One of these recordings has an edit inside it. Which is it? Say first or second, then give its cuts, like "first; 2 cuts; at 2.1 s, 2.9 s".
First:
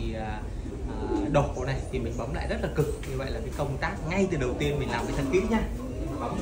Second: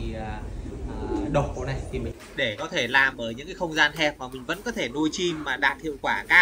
second; 1 cut; at 2.1 s